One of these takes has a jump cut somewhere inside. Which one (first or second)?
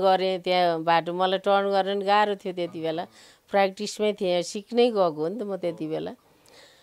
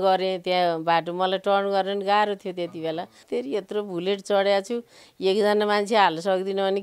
second